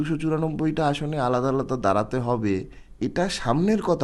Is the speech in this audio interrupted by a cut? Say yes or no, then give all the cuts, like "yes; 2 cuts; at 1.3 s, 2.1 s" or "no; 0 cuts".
yes; 1 cut; at 2.8 s